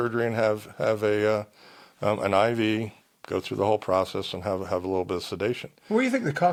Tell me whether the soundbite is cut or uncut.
uncut